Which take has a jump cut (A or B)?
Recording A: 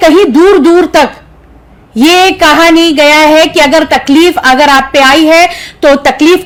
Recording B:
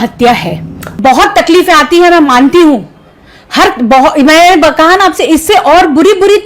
B